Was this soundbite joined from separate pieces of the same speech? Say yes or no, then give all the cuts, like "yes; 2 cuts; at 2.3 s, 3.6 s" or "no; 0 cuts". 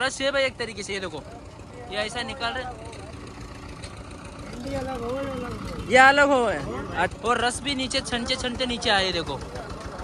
yes; 1 cut; at 7.1 s